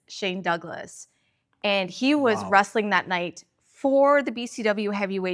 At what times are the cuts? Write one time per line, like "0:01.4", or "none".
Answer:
none